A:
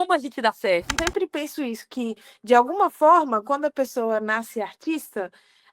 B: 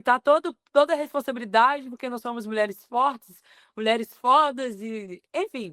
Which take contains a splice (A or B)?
A